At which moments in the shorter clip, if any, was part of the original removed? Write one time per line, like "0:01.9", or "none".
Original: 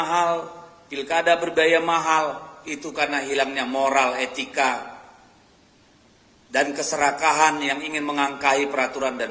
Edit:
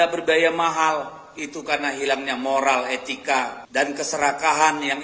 0:03.6